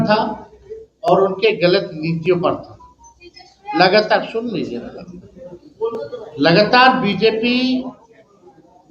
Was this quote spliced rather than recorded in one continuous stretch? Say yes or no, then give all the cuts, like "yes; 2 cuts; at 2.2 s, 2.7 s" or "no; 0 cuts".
no; 0 cuts